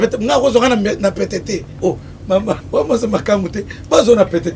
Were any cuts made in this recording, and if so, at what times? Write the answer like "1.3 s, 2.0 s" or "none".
1.7 s, 2.6 s